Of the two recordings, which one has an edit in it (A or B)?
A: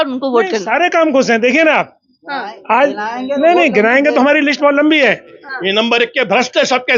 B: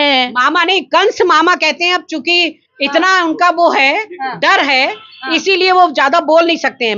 A